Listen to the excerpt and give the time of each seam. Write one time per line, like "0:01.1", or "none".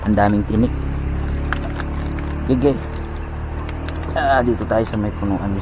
none